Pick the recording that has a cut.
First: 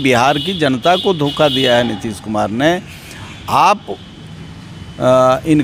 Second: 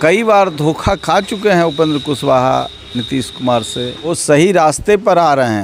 second; 1 cut; at 4.2 s

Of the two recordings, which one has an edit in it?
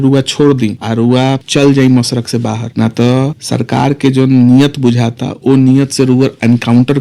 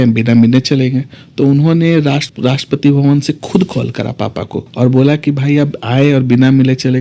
first; 3 cuts; at 1.3 s, 2.6 s, 3.4 s

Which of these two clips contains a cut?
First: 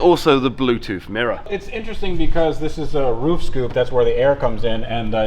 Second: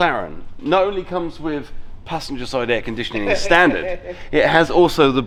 first; 1 cut; at 1.5 s

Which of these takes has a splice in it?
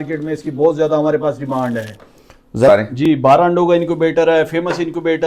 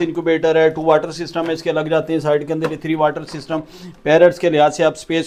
first; 1 cut; at 2.7 s

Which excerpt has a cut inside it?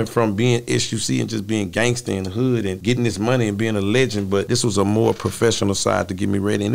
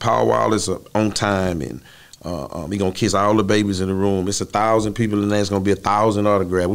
first; 2 cuts; at 2.8 s, 4.5 s

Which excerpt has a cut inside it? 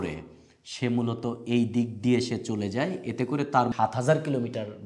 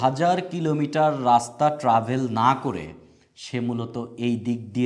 first; 1 cut; at 3.7 s

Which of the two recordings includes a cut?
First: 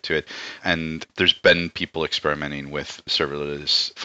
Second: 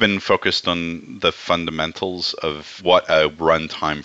first; 2 cuts; at 1.1 s, 3.1 s

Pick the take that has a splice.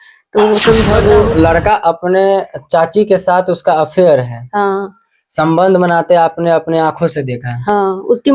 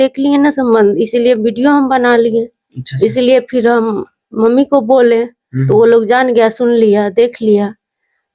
first; 1 cut; at 1.0 s

